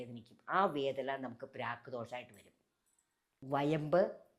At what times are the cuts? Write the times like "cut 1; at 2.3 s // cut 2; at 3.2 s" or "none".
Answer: cut 1; at 3.4 s

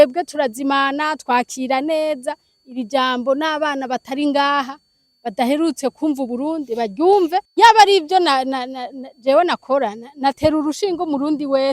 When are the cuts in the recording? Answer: cut 1; at 7.5 s

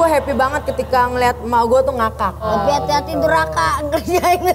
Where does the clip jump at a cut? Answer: cut 1; at 2.5 s

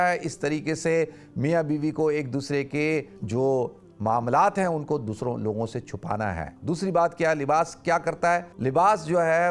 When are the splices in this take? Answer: cut 1; at 3.2 s // cut 2; at 6.6 s // cut 3; at 8.5 s

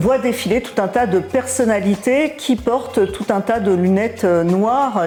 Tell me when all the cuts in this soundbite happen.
none

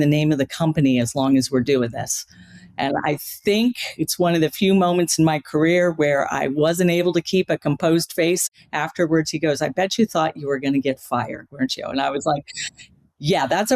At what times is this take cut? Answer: cut 1; at 8.4 s

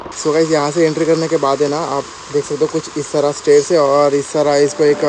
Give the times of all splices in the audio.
none

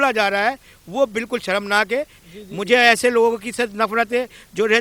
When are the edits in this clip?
cut 1; at 2.2 s

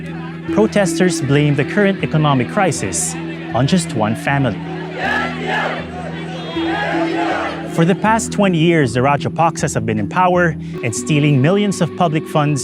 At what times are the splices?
cut 1; at 10.7 s

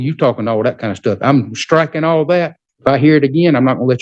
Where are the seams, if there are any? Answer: cut 1; at 2.6 s

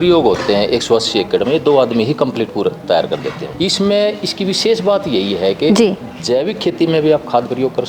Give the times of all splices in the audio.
cut 1; at 3.5 s

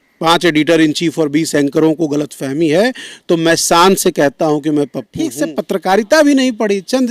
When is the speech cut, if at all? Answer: cut 1; at 5.3 s

